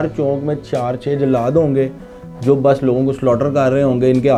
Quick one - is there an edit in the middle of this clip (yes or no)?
no